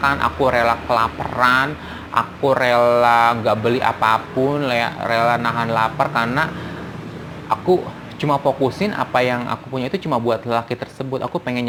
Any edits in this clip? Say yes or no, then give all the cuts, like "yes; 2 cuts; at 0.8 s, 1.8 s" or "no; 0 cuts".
no; 0 cuts